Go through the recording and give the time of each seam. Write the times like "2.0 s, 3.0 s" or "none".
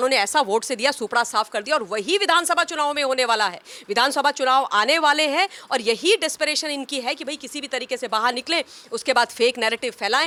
none